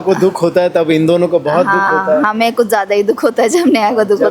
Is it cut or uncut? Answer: uncut